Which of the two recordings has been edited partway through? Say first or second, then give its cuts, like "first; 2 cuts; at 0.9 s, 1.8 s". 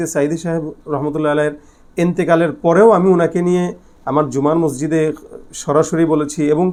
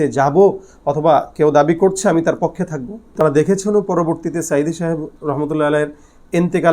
second; 1 cut; at 3.2 s